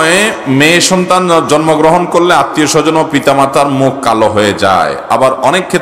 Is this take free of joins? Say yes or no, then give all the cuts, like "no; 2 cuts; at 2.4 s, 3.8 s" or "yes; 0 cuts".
yes; 0 cuts